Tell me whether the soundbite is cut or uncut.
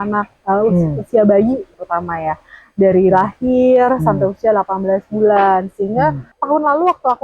cut